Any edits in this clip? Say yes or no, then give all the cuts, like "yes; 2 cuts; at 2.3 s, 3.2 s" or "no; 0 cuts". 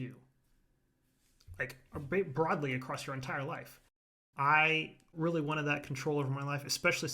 yes; 2 cuts; at 4.1 s, 5.1 s